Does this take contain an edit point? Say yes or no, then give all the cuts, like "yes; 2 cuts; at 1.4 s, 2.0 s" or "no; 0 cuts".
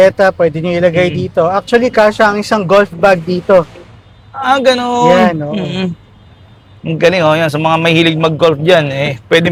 no; 0 cuts